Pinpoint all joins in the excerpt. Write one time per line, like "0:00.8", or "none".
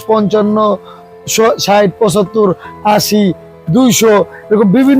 none